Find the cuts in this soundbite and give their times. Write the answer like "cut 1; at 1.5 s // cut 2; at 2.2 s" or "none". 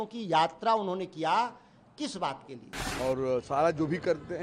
cut 1; at 2.8 s